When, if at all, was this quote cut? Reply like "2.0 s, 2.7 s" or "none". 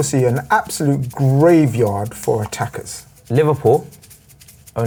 none